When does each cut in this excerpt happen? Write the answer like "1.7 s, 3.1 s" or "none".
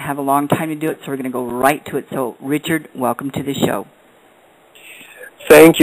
2.5 s

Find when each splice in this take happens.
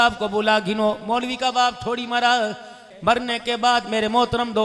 2.8 s

